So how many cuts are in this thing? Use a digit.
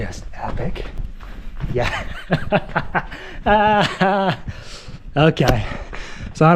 1